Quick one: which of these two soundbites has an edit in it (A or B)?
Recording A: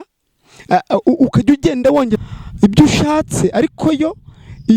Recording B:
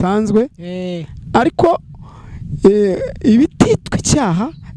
A